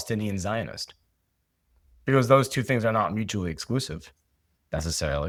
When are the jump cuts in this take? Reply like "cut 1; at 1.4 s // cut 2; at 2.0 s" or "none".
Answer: none